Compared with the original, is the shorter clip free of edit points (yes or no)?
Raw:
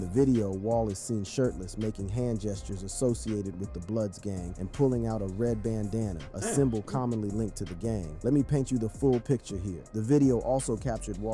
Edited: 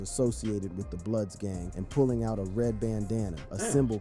yes